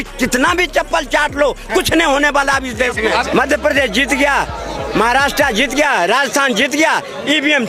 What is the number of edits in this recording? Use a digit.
1